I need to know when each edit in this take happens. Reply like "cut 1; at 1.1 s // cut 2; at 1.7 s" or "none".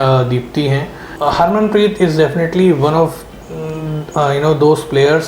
cut 1; at 1.1 s

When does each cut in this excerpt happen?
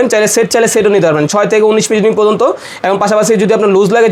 none

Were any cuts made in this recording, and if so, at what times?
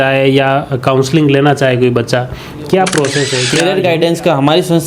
cut 1; at 3.4 s

